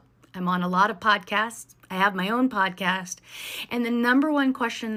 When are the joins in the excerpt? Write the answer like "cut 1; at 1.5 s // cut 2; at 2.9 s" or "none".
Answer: none